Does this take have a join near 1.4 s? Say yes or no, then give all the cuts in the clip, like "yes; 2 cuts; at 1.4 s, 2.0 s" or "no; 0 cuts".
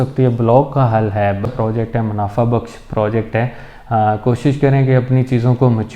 yes; 1 cut; at 1.4 s